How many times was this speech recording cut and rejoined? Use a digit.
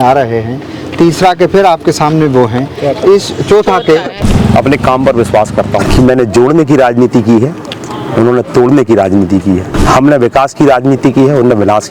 3